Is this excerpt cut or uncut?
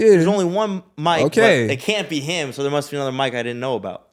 uncut